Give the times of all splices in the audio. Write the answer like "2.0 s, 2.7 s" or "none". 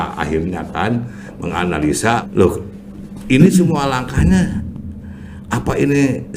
2.2 s